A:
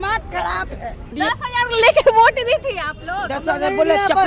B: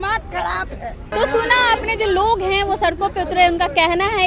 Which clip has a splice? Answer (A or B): A